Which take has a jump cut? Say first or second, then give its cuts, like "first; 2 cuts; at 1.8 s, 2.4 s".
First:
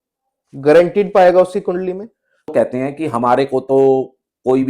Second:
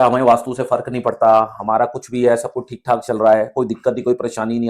first; 1 cut; at 2.5 s